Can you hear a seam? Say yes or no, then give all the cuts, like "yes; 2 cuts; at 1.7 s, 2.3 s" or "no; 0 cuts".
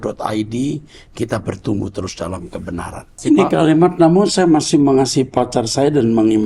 yes; 1 cut; at 3.2 s